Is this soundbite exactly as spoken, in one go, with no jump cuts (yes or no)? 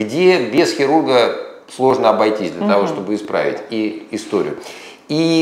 yes